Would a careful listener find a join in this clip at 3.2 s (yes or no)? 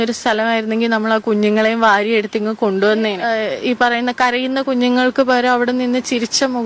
yes